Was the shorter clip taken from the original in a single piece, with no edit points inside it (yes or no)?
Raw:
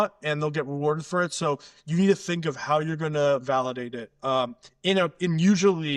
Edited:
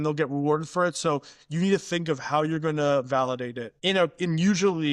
no